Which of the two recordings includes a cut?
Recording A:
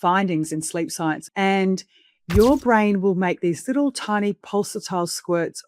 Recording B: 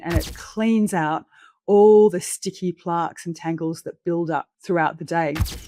A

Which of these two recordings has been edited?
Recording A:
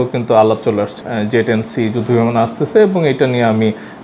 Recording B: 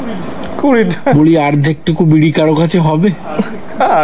A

